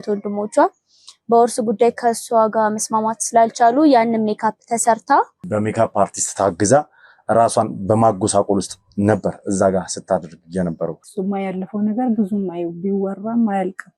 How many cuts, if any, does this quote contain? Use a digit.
2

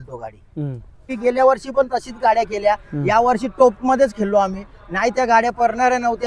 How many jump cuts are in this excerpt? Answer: 1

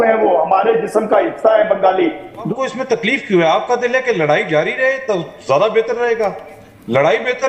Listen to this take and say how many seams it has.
1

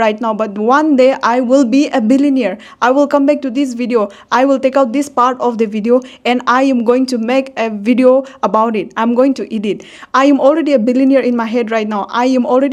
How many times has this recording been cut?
0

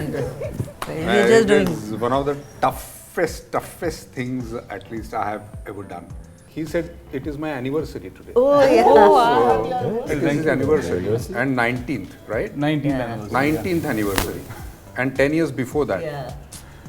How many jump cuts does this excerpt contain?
1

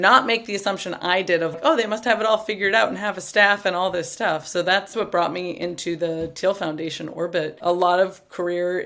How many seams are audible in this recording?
2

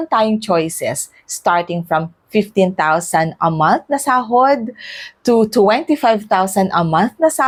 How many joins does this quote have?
0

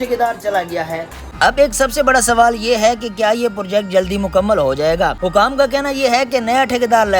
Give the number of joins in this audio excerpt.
2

